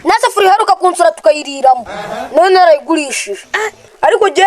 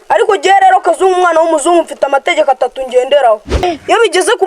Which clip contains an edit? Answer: second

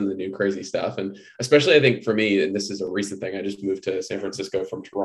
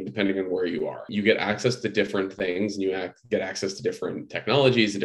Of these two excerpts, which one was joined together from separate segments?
second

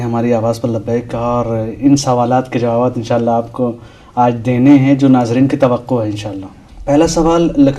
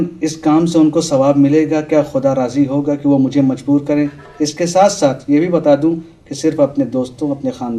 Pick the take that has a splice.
second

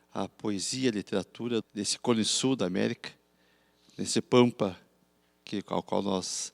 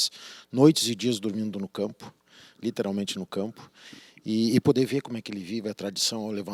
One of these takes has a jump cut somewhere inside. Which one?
first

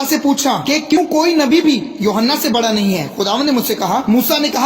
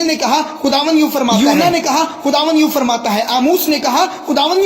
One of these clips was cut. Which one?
first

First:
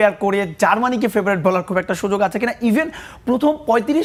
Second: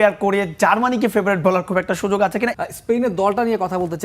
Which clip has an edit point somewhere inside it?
second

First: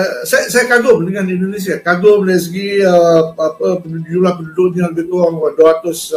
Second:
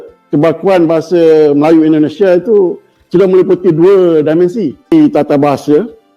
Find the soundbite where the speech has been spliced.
second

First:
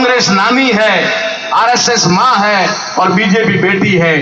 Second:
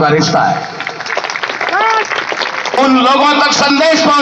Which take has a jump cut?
second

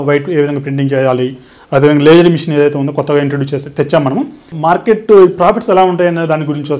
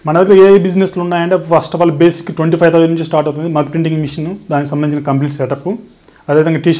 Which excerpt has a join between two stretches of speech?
first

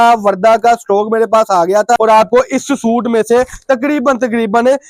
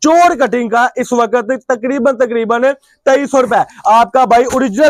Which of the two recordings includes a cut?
first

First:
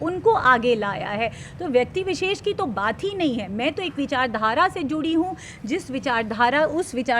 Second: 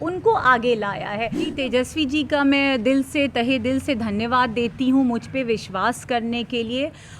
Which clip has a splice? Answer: second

